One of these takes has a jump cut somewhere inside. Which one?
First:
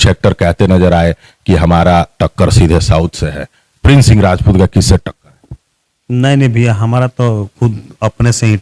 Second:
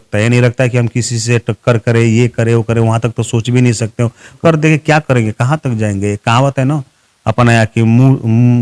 second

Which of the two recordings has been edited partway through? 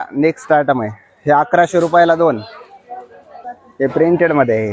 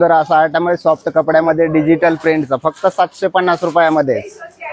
first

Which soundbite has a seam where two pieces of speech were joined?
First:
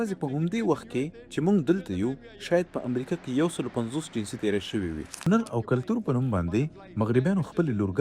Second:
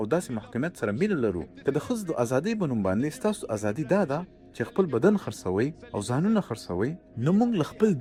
first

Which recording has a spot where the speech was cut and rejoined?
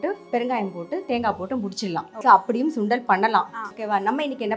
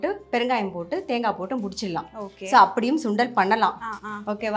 first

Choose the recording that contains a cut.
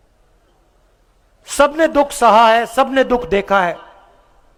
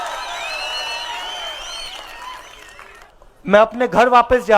second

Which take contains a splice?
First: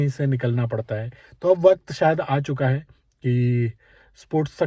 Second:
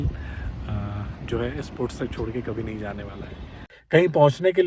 second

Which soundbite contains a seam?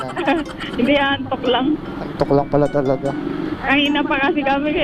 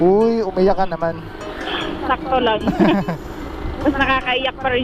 first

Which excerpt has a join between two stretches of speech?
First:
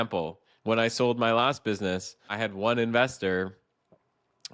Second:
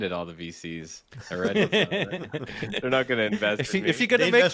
first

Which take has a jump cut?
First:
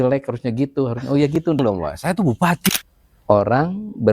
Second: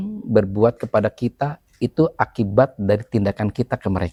first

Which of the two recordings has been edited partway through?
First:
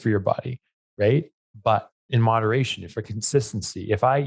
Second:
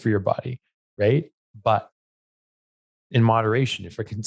first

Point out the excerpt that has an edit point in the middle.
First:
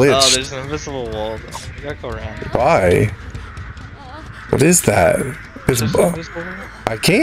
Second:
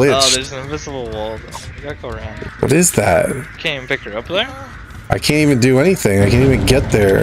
second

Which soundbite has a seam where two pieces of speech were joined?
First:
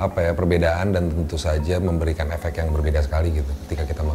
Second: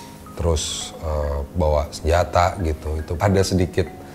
second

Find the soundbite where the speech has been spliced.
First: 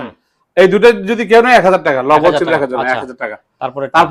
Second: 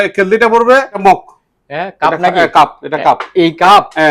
second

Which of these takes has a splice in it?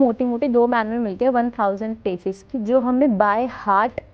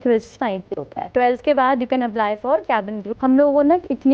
second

